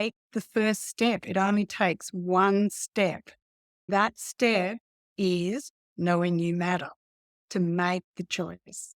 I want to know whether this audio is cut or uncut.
cut